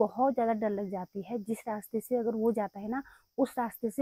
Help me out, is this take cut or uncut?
uncut